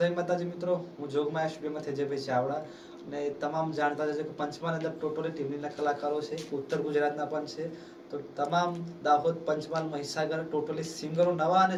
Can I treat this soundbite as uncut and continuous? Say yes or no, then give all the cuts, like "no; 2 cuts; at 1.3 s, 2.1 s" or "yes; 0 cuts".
yes; 0 cuts